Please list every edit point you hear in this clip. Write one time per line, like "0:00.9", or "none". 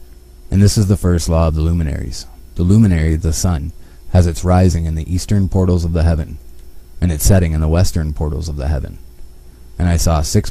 0:04.7